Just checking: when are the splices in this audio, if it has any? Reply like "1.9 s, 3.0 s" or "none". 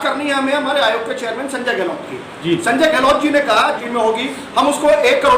3.8 s